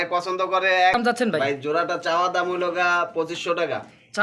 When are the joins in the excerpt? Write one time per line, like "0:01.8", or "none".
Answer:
0:00.9